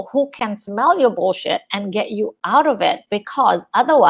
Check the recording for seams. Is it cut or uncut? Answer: uncut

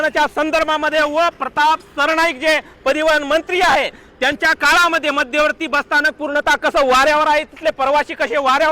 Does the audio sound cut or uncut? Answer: uncut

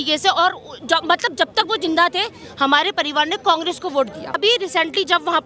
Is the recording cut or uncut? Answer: cut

